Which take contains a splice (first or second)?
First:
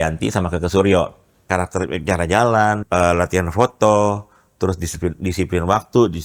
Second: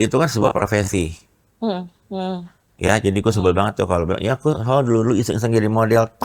first